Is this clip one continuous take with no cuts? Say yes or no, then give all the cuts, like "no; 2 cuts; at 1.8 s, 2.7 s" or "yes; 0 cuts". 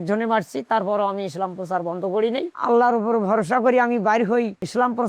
yes; 0 cuts